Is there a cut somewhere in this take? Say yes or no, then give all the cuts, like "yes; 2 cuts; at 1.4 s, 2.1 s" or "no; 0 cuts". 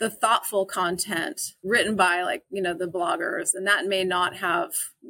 no; 0 cuts